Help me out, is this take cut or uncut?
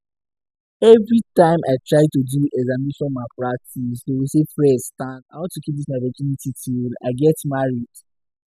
cut